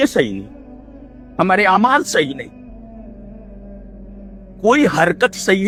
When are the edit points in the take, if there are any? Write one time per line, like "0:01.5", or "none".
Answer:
none